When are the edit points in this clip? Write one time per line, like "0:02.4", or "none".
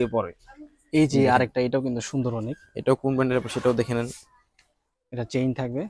none